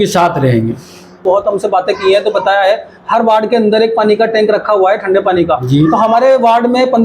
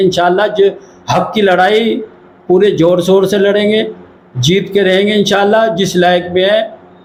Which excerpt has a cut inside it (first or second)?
first